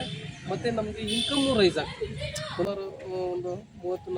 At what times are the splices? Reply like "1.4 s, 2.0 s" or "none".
2.7 s